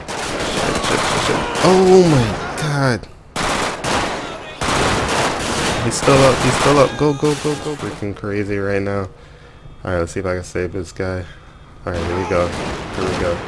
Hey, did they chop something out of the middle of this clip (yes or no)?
yes